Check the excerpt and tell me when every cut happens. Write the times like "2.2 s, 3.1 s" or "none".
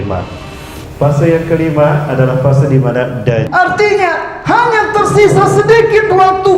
3.5 s